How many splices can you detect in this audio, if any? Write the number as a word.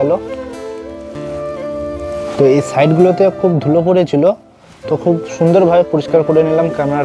zero